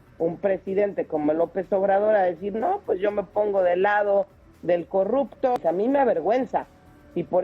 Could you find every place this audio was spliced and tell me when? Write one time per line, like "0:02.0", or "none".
0:05.6